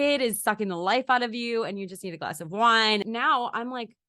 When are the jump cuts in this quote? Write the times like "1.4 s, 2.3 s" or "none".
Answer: 3.0 s